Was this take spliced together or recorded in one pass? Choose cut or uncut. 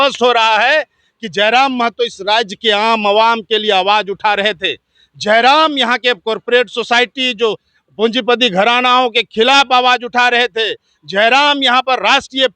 uncut